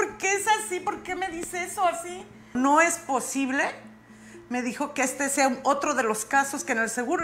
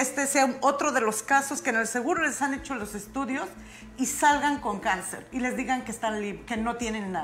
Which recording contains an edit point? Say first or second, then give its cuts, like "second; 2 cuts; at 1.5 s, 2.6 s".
first; 1 cut; at 2.5 s